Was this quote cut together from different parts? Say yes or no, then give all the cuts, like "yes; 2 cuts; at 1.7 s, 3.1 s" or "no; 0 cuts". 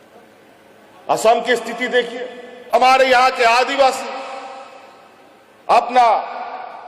yes; 1 cut; at 2.6 s